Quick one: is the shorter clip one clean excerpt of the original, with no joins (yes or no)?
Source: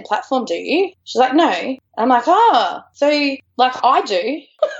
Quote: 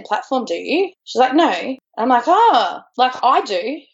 no